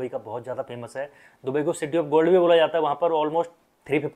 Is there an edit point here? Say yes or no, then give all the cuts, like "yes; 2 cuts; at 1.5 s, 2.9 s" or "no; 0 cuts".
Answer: no; 0 cuts